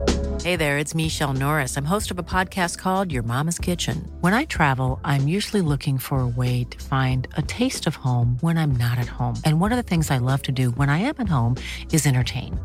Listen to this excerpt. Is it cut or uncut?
uncut